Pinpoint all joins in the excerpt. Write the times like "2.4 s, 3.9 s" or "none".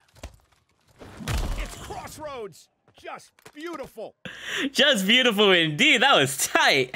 none